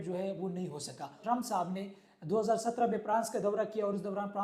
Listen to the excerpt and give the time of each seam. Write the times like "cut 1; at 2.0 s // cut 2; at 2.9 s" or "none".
cut 1; at 1.2 s